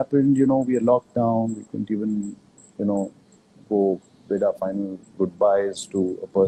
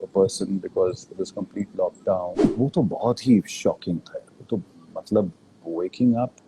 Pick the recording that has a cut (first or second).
second